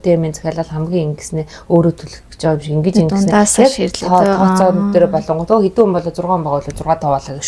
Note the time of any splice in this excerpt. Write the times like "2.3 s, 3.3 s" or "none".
none